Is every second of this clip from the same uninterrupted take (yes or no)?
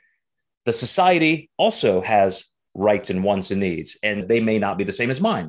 no